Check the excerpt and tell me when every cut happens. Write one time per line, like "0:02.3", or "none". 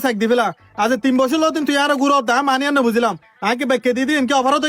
none